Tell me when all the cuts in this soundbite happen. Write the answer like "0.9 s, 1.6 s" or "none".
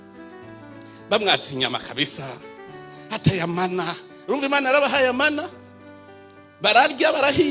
0.9 s

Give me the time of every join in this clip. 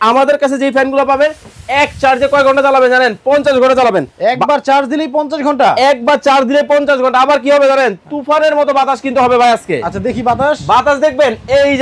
none

